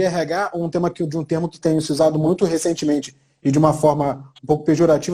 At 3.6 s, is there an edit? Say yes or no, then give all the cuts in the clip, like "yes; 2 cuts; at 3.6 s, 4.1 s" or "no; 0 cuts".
no; 1 cut; at 2.3 s